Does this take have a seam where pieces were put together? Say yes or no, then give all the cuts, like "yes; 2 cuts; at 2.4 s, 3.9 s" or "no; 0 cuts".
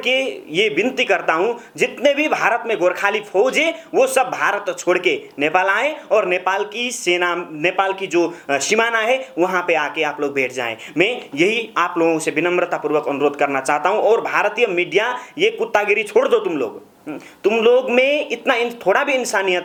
no; 0 cuts